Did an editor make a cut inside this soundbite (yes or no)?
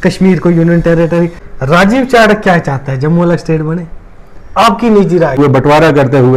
yes